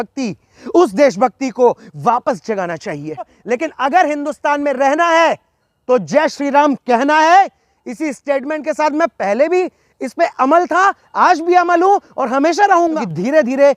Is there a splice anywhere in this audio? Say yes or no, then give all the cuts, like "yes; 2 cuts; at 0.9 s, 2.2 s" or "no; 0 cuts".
yes; 2 cuts; at 3.4 s, 12.9 s